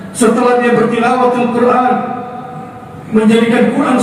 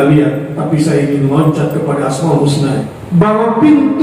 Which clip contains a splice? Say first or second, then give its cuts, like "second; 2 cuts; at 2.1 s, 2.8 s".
second; 1 cut; at 2.9 s